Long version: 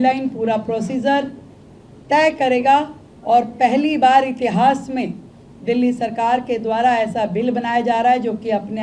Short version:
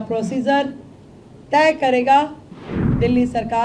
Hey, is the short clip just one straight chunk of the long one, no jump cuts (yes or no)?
no